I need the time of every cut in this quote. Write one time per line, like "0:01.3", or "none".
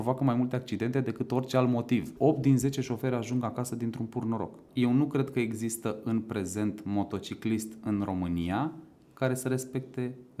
0:02.1
0:04.6